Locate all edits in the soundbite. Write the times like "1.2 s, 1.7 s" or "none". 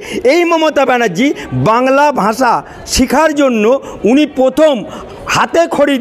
none